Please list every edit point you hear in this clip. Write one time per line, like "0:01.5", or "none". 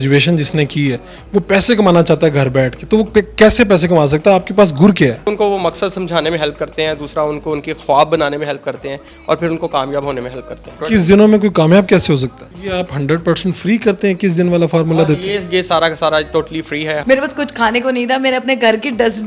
0:05.3
0:10.8
0:12.4
0:17.0

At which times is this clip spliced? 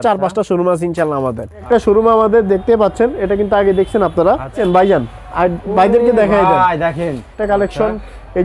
0:01.6
0:04.6
0:07.4

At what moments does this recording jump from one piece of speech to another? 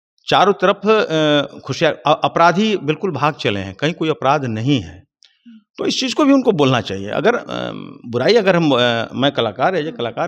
none

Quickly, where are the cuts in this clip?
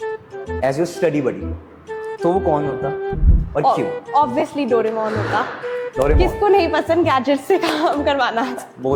none

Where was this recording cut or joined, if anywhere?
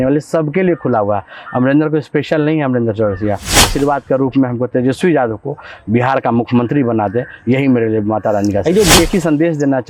0:03.7
0:09.0

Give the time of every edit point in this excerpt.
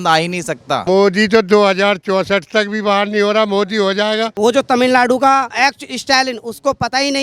0:00.8
0:04.3
0:05.5

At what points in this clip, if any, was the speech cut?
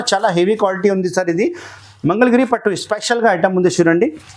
none

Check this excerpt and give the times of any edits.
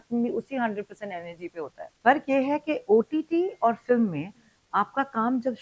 0:01.8

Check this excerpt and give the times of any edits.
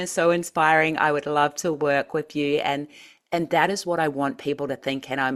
none

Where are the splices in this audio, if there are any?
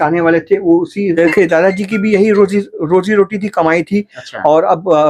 0:01.1

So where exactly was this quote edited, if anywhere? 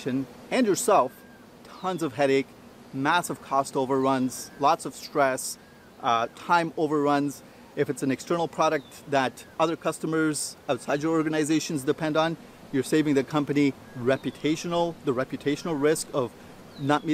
none

